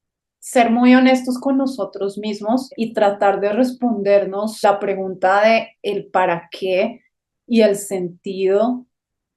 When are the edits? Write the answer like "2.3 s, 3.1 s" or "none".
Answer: 2.7 s, 4.6 s

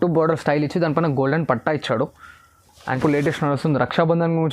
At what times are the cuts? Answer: 3.0 s

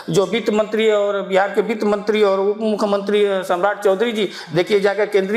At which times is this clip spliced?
none

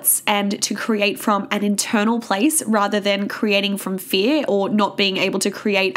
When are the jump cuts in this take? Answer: none

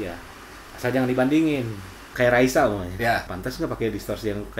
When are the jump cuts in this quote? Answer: 2.0 s, 3.3 s

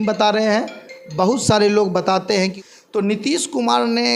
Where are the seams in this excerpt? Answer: 2.4 s

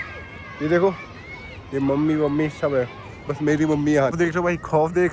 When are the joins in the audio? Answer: 4.1 s

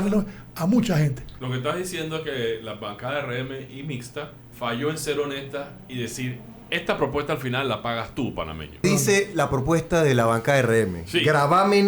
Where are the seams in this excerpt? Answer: 1.3 s, 4.4 s, 8.8 s

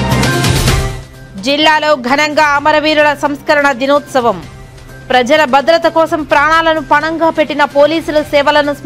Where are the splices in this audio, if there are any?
1.0 s

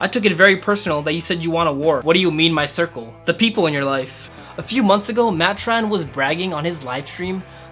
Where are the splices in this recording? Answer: 2.0 s, 4.3 s

